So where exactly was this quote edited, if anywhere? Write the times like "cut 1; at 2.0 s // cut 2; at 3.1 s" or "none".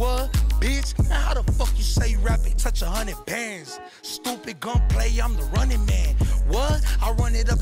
none